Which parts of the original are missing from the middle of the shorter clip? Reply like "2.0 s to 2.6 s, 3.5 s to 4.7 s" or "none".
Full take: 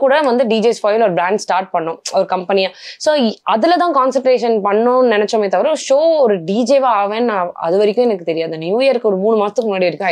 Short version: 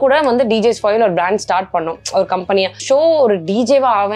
2.8 s to 5.8 s